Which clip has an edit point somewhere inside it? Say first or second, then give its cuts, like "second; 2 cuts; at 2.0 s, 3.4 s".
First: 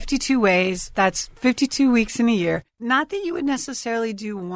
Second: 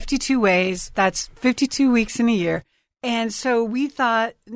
first; 1 cut; at 2.7 s